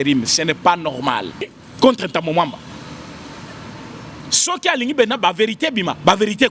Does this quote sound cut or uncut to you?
cut